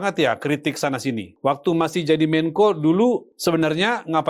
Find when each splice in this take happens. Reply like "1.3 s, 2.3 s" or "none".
1.3 s, 3.3 s